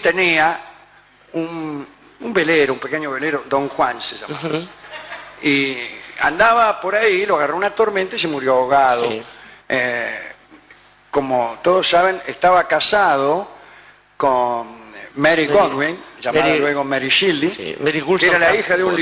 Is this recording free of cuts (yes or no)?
no